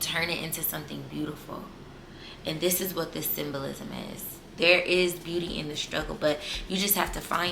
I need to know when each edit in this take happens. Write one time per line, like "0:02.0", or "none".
0:04.5